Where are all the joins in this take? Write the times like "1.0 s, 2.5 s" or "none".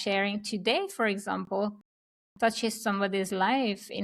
none